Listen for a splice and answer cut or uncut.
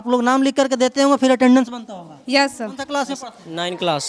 cut